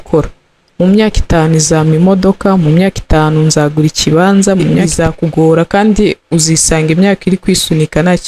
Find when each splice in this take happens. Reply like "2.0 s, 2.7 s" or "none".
4.9 s